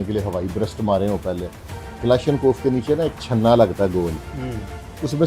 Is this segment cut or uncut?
uncut